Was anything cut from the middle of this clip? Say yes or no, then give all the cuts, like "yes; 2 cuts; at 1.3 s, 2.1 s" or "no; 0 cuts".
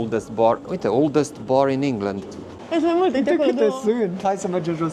yes; 1 cut; at 2.6 s